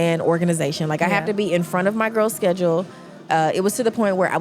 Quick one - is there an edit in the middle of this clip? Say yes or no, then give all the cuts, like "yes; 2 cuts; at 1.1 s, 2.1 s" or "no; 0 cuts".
no; 0 cuts